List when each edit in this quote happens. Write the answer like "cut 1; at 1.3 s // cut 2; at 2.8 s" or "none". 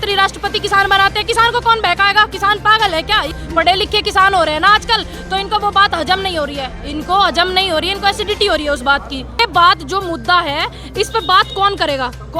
cut 1; at 3.4 s // cut 2; at 9.4 s